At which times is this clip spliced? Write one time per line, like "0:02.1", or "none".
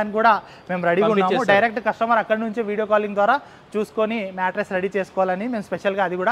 none